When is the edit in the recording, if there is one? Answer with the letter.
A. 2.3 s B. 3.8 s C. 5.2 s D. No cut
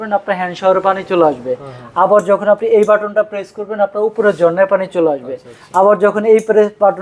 D